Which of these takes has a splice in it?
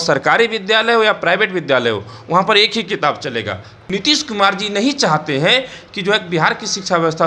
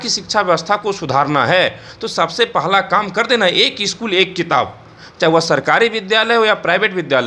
first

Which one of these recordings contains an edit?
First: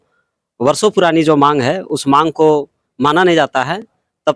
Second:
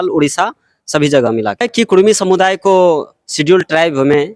second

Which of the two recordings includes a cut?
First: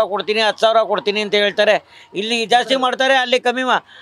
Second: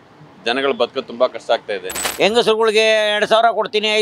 second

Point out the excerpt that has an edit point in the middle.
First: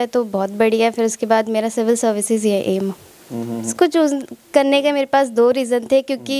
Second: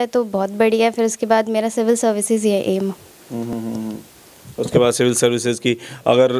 first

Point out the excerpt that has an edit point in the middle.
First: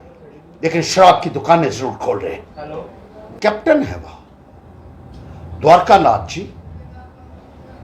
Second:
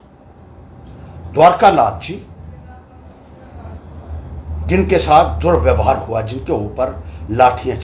first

